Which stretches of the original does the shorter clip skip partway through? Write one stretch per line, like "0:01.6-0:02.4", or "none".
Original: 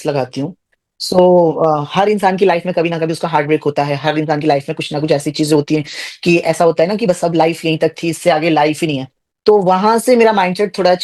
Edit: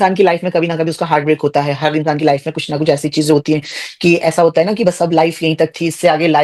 none

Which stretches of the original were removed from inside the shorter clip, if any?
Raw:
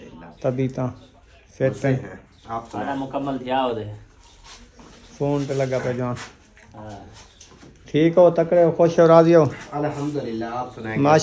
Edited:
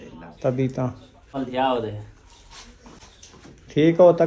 0:01.3-0:03.3
0:05.0-0:07.2

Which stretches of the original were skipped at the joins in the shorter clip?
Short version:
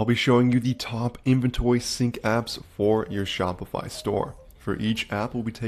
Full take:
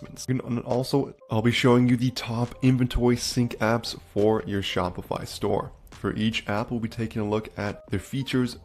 none

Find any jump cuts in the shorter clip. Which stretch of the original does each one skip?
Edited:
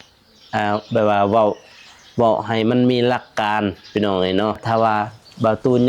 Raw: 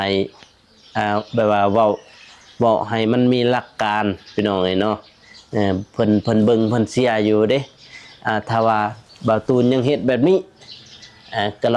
0:05.0-0:08.5

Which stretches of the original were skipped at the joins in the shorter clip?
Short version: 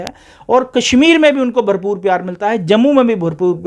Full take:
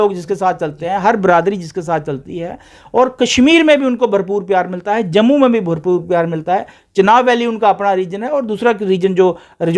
none

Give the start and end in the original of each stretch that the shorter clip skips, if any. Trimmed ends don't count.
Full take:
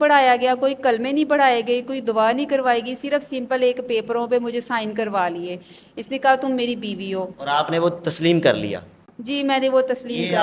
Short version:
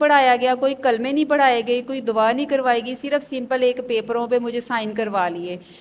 none

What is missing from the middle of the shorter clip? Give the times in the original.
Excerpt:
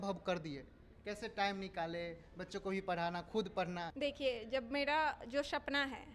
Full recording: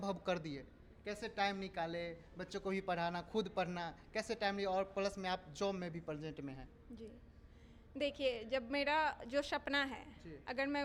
0:03.9-0:07.9

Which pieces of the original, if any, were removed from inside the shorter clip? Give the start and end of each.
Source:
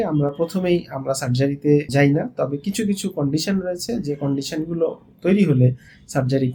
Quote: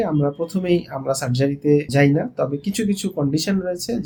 none

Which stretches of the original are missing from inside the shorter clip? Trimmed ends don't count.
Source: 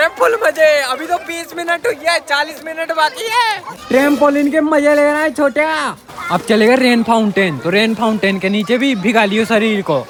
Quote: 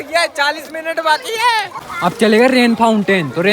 0:03.7-0:06.1

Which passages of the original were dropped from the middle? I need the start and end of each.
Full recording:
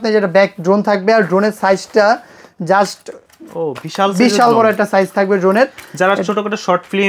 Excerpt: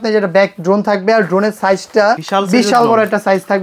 0:02.2-0:03.9

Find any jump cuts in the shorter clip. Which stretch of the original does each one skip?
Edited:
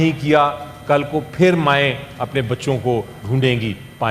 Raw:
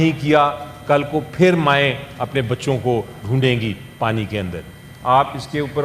none

